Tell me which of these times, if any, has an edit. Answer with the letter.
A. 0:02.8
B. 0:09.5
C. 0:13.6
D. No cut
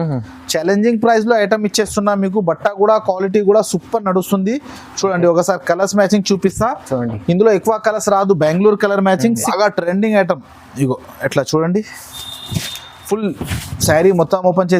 B